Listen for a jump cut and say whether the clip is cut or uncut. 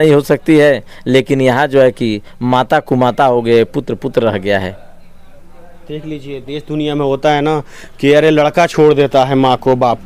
uncut